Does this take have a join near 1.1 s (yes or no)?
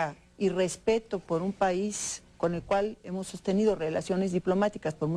no